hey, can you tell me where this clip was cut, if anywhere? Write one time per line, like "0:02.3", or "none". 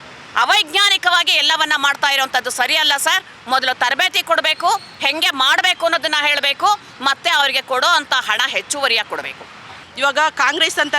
0:09.9